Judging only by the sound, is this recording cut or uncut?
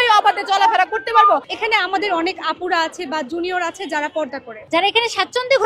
cut